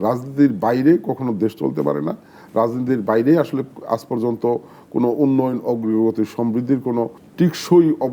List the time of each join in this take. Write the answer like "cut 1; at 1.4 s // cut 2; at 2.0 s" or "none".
cut 1; at 7.2 s